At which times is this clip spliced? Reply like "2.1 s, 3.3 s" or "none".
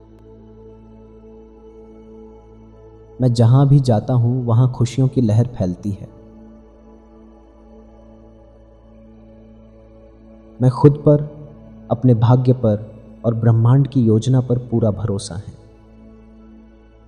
1.4 s, 3.1 s, 6.1 s, 8.5 s, 10.6 s, 15.6 s